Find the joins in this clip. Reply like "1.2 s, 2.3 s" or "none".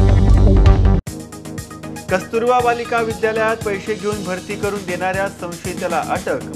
2.0 s

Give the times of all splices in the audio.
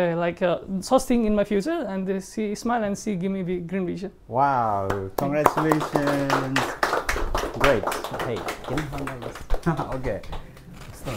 none

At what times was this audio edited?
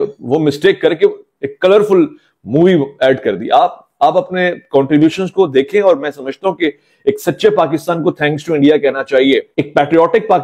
none

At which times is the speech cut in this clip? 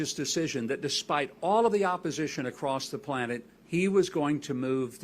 3.5 s

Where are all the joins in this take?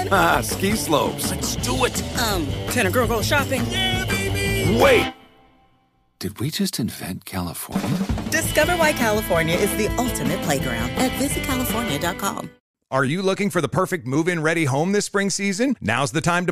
12.6 s

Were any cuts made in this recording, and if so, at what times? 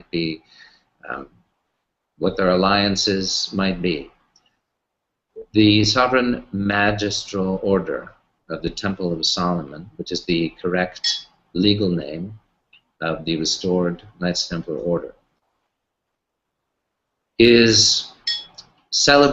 4.1 s

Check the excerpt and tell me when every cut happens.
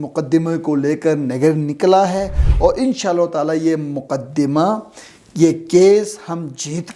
none

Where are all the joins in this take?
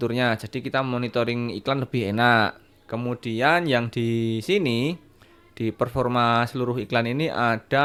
none

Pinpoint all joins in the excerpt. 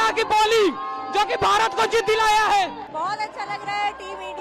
2.9 s

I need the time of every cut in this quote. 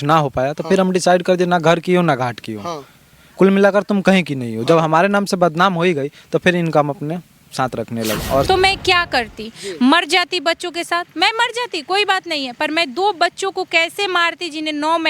8.5 s

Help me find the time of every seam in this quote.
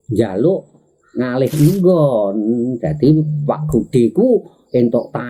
none

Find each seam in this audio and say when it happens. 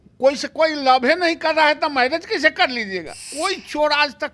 3.3 s

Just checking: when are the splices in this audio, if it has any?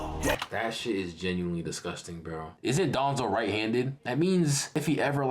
2.5 s

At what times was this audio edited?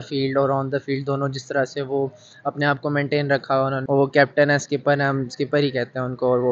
3.8 s

